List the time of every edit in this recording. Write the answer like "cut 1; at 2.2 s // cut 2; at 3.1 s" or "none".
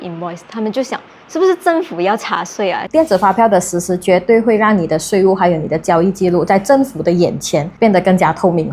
cut 1; at 2.8 s // cut 2; at 7.7 s